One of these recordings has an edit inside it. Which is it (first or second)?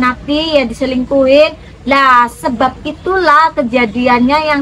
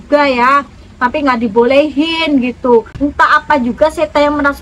second